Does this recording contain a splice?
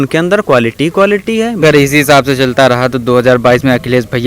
yes; 1 cut; at 1.6 s

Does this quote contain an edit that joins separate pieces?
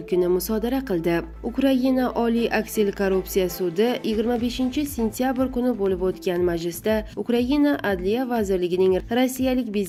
no; 0 cuts

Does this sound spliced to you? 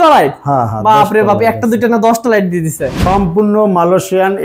yes; 1 cut; at 3.1 s

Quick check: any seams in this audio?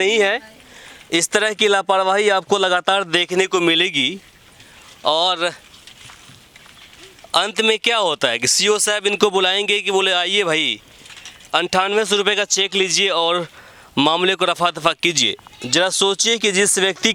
no; 0 cuts

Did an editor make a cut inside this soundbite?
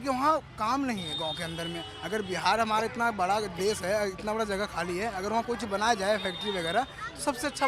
no; 0 cuts

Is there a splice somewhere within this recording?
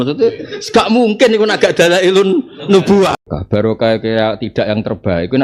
yes; 1 cut; at 3.2 s

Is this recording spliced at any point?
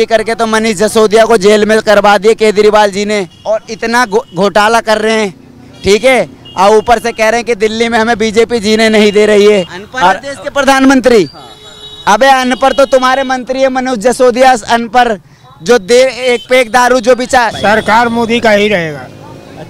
yes; 3 cuts; at 3.4 s, 9.8 s, 17.5 s

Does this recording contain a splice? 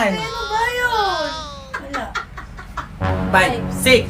yes; 1 cut; at 3.1 s

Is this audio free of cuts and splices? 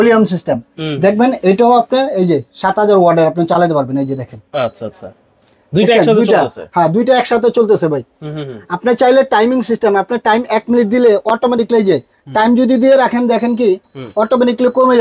yes; 0 cuts

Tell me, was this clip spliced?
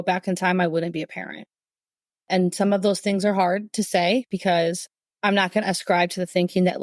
yes; 1 cut; at 4.8 s

